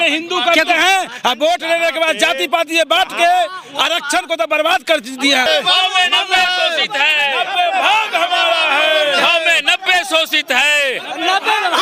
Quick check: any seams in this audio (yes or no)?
yes